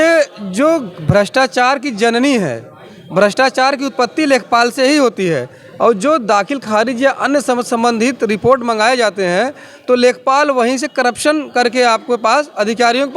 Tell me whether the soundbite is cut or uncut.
uncut